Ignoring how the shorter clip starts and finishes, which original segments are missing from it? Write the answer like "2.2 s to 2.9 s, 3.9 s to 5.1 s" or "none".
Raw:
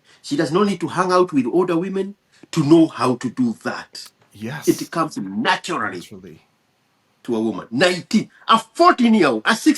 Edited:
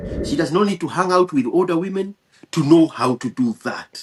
none